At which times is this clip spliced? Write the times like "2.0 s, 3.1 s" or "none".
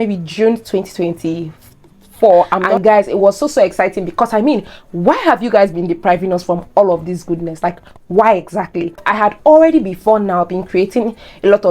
2.6 s, 9.1 s